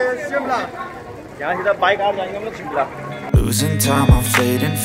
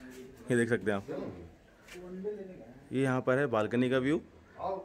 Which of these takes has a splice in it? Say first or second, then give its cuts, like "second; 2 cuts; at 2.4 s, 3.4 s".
first; 1 cut; at 3.2 s